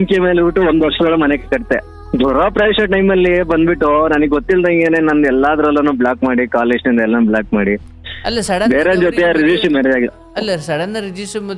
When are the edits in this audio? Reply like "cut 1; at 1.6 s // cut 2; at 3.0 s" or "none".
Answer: none